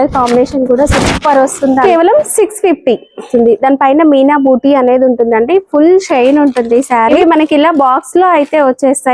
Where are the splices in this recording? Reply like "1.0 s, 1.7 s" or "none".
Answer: 1.8 s, 3.3 s, 7.1 s